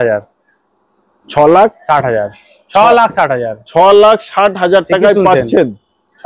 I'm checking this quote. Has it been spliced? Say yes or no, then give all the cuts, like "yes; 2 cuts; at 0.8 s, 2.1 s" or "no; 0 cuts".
no; 0 cuts